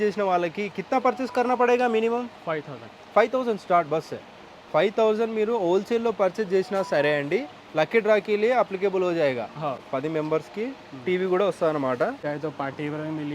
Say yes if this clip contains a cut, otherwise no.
yes